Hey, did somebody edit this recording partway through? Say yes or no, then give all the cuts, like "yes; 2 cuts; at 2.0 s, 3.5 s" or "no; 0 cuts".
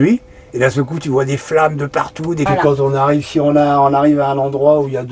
yes; 1 cut; at 2.5 s